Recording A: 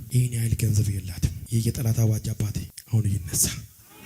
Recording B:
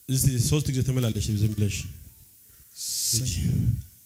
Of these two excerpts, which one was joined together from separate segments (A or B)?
A